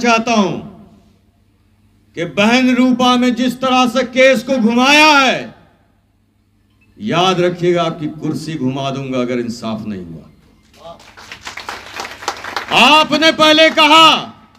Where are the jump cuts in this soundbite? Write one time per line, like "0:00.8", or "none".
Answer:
none

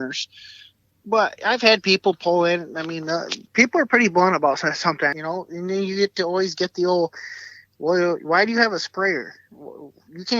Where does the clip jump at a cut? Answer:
0:05.1

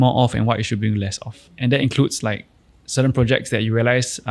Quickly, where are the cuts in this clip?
0:01.5

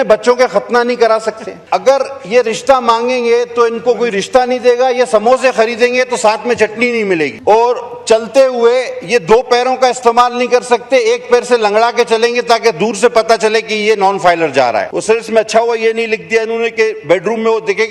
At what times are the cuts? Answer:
0:01.5
0:07.4
0:14.9

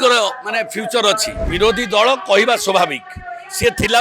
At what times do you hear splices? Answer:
0:01.4

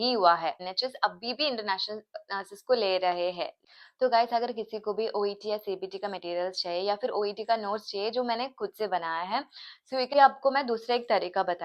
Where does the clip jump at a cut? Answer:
0:03.5
0:10.1

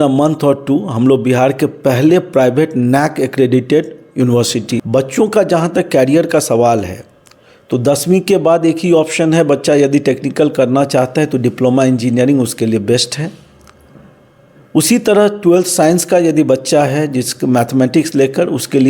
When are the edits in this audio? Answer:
none

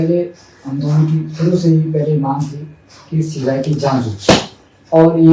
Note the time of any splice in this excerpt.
none

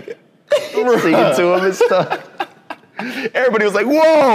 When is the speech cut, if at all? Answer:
none

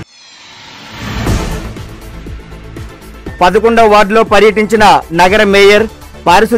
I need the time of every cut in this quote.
none

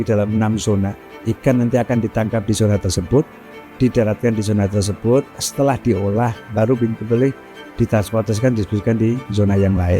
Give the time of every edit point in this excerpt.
0:01.1

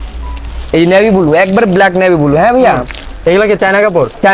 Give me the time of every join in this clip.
none

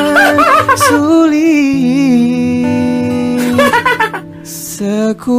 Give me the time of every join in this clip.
none

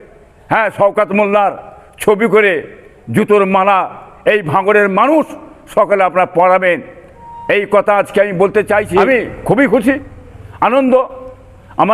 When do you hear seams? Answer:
0:09.0

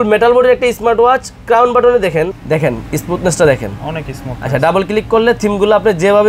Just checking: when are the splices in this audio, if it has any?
0:02.4

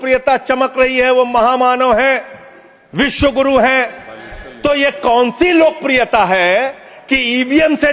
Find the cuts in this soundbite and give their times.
0:06.9

